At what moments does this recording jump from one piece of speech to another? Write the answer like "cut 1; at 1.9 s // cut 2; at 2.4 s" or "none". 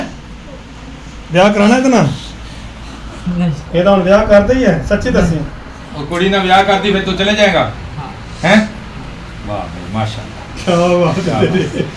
none